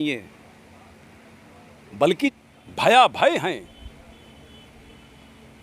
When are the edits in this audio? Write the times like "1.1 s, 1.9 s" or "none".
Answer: 2.3 s